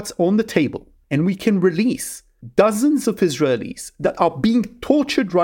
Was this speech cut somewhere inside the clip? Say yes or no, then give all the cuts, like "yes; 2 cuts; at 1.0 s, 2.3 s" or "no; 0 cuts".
no; 0 cuts